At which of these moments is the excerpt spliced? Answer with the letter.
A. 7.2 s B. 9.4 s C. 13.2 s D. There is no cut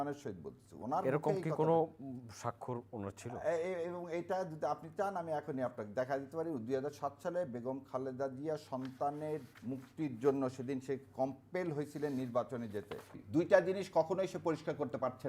C